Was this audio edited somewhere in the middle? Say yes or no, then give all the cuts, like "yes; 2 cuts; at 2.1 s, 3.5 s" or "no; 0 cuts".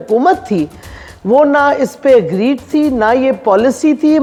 no; 0 cuts